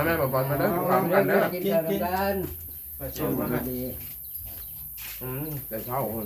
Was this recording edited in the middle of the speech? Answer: no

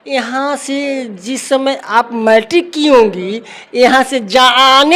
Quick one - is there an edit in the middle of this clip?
no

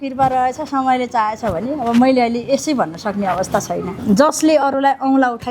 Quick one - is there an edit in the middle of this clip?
yes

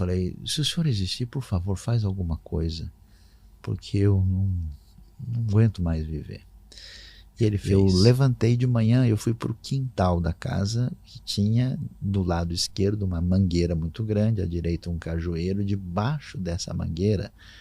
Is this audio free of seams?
no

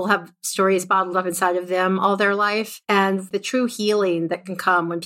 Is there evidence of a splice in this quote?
yes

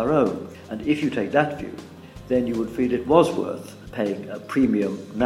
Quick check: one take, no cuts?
yes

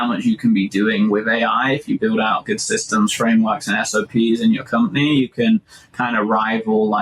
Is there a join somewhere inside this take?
no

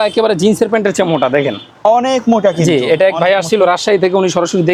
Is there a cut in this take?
no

